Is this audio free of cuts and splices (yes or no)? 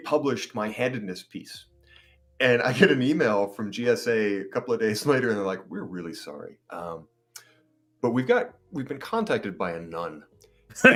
yes